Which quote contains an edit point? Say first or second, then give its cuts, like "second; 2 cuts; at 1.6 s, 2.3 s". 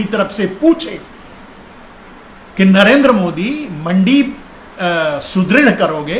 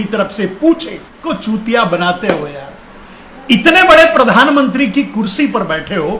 second; 1 cut; at 1.2 s